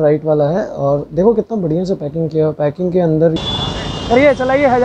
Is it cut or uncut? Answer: cut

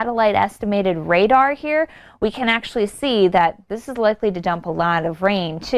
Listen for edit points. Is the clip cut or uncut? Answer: uncut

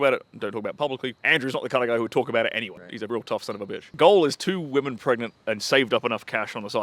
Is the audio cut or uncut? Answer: cut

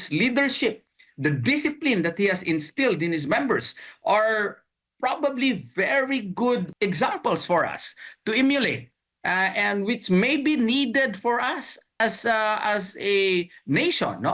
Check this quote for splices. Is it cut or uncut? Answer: cut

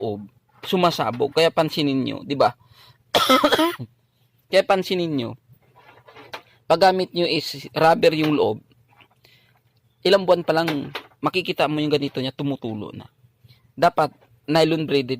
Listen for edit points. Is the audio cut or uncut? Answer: uncut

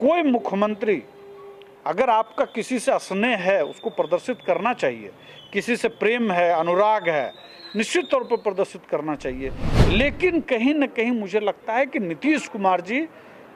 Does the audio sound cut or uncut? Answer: uncut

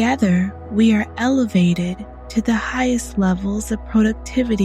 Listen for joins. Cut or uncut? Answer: uncut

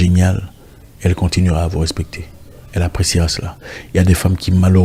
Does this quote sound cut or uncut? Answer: uncut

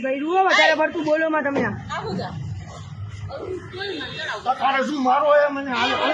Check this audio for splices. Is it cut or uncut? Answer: uncut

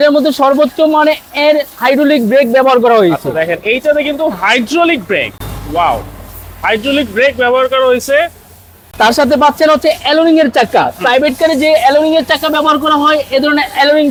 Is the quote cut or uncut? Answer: uncut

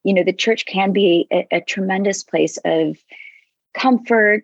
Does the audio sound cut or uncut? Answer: uncut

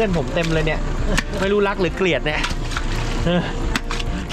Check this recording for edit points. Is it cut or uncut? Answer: uncut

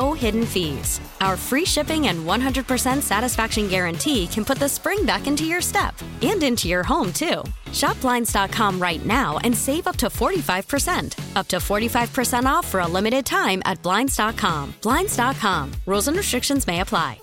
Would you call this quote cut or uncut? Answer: uncut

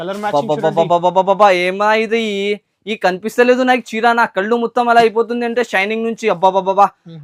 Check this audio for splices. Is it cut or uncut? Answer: uncut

